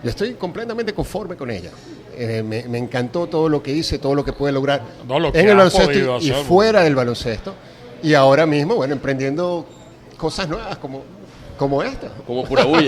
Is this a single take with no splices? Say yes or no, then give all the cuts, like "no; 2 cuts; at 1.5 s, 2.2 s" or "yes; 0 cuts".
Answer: yes; 0 cuts